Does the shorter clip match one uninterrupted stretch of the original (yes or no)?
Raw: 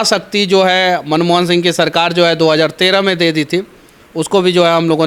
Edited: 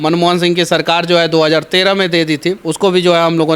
no